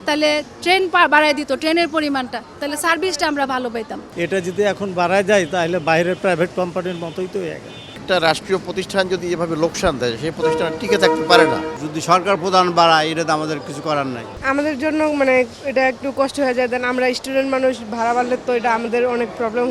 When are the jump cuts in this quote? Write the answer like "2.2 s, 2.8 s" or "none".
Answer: 4.0 s, 8.0 s, 11.7 s, 14.3 s